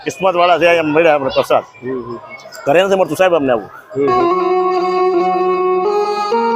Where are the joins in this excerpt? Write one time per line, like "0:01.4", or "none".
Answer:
0:04.1